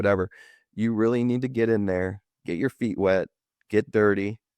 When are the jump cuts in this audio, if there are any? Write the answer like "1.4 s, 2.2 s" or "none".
none